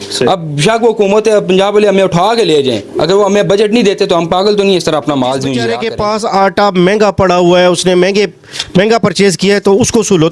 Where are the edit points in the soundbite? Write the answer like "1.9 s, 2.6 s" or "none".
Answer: 5.8 s